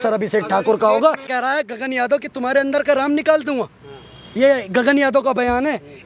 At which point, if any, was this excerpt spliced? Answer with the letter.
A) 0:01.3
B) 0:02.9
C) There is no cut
A